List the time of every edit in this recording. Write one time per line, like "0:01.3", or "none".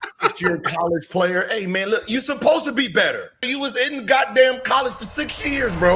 0:03.5